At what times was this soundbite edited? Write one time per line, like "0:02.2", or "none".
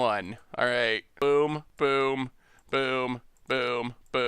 0:01.1
0:01.7